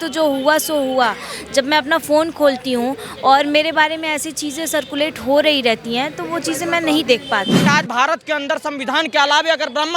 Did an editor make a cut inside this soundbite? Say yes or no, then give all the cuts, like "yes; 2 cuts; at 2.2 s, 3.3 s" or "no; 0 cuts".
yes; 1 cut; at 7.6 s